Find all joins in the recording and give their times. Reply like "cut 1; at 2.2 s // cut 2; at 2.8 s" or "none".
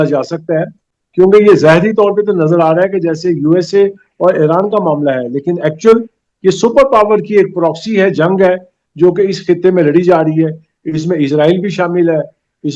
none